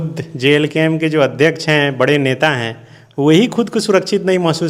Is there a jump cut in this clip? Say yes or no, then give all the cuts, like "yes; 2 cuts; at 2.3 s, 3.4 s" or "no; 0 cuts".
no; 0 cuts